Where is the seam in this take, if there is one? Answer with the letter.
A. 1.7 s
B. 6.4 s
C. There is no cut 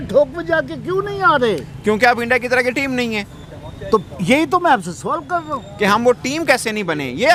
C